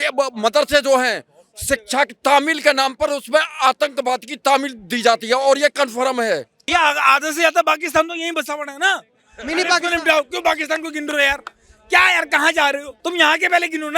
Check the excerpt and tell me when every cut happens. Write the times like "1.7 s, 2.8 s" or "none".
6.7 s, 12.9 s